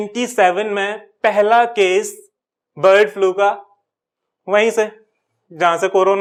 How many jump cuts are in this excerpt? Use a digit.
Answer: 0